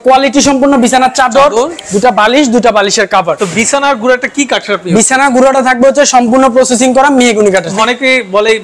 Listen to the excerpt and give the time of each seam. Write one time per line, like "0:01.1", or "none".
0:03.4
0:07.7